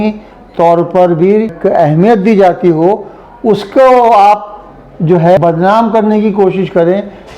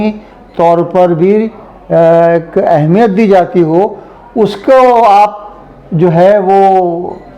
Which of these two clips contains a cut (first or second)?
first